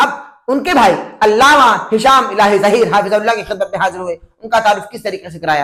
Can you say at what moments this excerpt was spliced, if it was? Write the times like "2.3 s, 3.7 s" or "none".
none

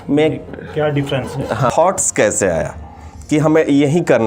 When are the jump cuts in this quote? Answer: 1.7 s

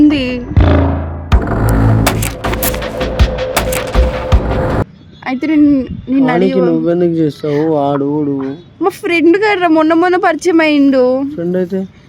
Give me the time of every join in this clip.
4.8 s

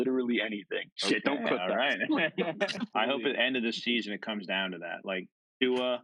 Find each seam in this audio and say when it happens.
0.9 s, 2.9 s

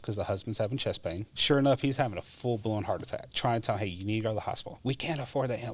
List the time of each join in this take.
1.3 s, 3.3 s, 4.7 s

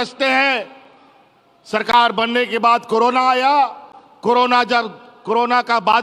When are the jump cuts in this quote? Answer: none

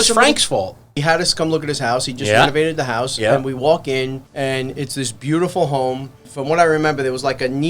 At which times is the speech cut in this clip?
1.0 s, 4.2 s, 6.3 s

